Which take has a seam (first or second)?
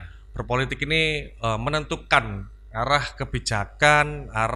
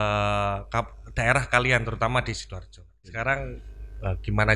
second